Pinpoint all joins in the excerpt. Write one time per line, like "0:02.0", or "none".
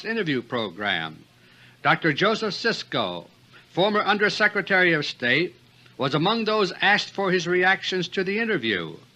none